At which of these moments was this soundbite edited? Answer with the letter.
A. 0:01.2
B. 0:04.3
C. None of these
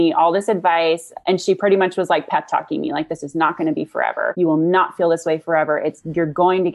B